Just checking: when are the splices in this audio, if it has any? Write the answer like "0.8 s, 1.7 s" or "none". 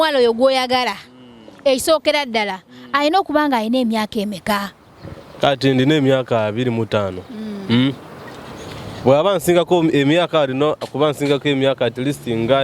1.0 s